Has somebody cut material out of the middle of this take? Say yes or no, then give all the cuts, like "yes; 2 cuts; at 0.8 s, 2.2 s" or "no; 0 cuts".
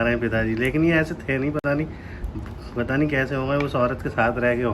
no; 0 cuts